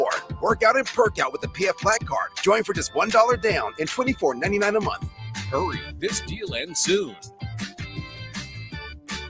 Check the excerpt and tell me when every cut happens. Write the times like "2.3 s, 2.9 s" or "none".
none